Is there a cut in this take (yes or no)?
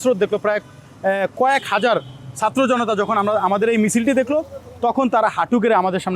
no